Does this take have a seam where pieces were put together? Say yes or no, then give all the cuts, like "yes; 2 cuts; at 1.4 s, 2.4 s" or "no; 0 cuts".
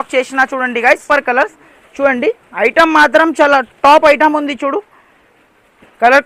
yes; 1 cut; at 1.0 s